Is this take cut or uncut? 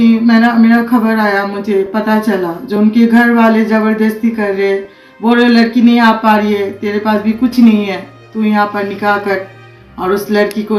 uncut